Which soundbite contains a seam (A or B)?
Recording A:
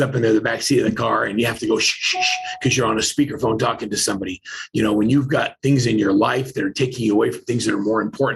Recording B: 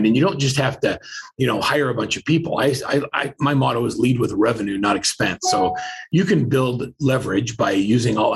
B